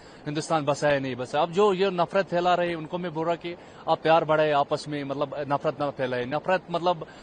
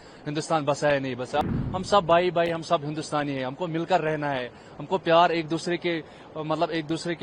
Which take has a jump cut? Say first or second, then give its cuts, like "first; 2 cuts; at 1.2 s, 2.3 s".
second; 1 cut; at 1.4 s